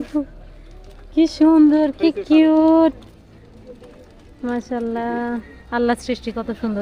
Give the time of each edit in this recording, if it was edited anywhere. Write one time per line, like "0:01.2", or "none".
none